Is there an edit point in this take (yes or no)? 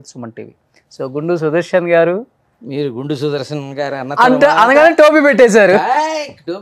no